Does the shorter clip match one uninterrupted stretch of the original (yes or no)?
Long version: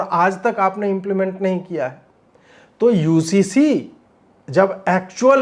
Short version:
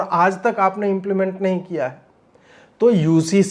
yes